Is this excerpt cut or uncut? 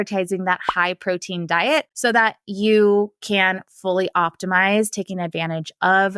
uncut